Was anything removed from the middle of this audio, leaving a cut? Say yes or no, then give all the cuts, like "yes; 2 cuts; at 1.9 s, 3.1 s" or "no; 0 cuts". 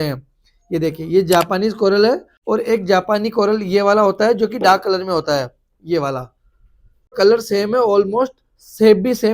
yes; 2 cuts; at 2.3 s, 7.1 s